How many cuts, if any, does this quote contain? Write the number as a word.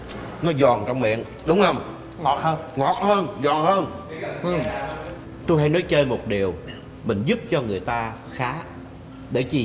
one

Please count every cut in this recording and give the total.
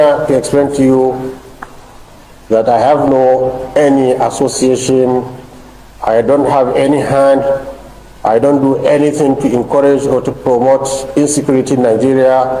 zero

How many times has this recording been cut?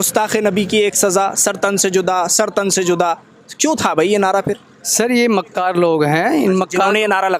zero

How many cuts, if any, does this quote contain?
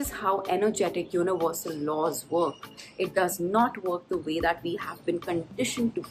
zero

